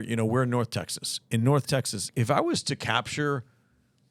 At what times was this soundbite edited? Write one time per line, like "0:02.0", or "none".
0:02.0